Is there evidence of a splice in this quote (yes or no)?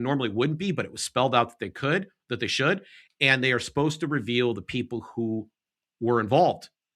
no